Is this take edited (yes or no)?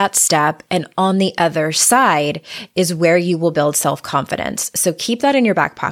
no